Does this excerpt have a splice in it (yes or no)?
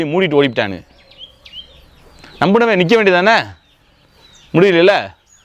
no